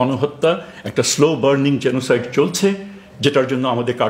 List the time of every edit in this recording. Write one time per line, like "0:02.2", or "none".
none